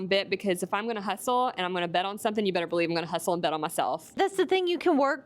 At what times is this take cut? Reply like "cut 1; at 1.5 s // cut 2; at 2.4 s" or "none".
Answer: cut 1; at 4.1 s